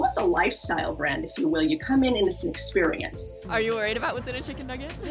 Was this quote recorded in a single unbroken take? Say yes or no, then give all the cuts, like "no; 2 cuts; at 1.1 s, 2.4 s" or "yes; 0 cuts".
no; 1 cut; at 3.3 s